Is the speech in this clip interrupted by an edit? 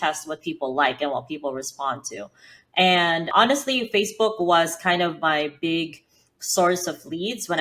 yes; 1 cut; at 3.3 s

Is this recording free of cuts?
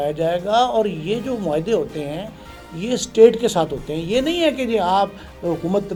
yes; 0 cuts

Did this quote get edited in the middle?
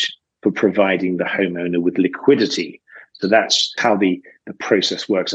yes; 1 cut; at 3.8 s

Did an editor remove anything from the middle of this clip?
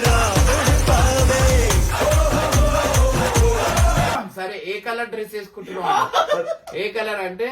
yes; 1 cut; at 4.2 s

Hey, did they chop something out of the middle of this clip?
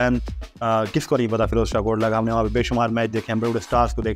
no; 0 cuts

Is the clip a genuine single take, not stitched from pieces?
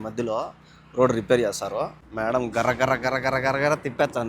no; 1 cut; at 2.0 s

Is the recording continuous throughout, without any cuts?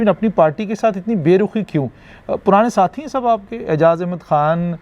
yes; 0 cuts

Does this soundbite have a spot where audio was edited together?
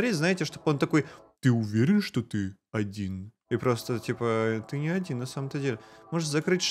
no; 0 cuts

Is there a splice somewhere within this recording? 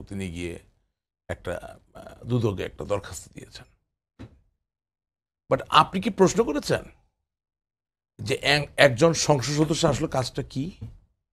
no; 0 cuts

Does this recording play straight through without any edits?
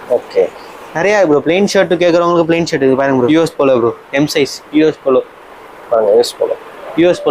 no; 1 cut; at 3.3 s

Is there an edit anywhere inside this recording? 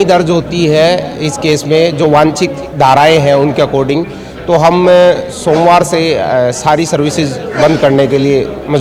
no; 0 cuts

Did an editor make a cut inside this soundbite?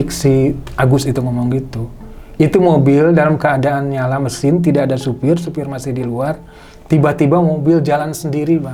no; 0 cuts

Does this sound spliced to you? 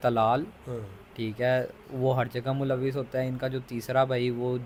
no; 0 cuts

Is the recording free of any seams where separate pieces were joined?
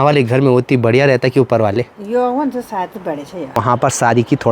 no; 1 cut; at 3.6 s

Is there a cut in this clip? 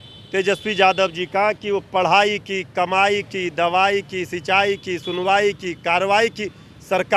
no; 0 cuts

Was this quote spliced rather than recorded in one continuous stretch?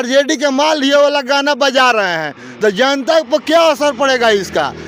no; 0 cuts

